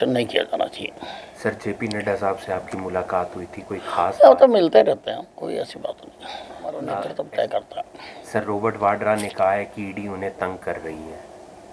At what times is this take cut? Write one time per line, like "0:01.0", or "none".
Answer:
0:07.3